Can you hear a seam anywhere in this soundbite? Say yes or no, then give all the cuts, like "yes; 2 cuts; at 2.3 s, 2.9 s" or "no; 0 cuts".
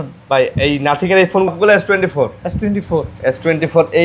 yes; 1 cut; at 1.5 s